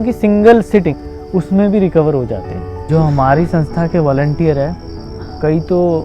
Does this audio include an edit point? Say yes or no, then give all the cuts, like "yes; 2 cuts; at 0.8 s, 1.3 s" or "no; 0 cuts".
yes; 2 cuts; at 0.9 s, 2.8 s